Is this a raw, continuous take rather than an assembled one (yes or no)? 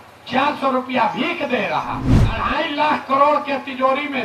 no